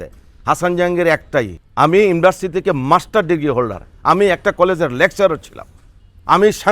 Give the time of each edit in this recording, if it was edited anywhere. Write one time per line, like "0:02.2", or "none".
0:01.6